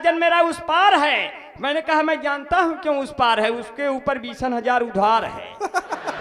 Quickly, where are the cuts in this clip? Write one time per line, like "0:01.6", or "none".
none